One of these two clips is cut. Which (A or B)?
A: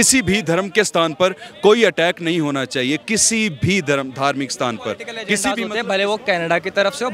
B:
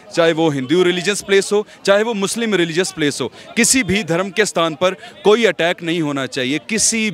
A